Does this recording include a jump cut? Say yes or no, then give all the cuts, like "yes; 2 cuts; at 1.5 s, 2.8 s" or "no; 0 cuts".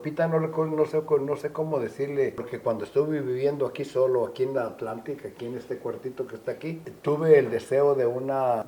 yes; 1 cut; at 2.4 s